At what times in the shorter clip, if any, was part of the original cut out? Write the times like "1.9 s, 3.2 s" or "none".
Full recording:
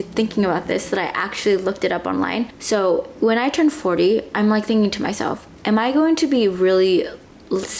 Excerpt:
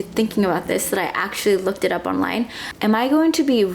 2.6 s